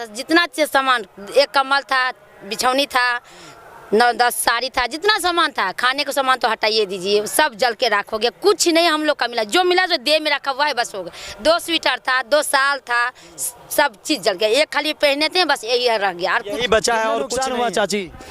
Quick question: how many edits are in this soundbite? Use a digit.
1